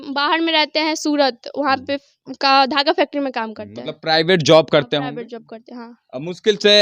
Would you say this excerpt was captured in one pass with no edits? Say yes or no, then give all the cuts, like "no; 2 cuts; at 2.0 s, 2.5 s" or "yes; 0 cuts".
yes; 0 cuts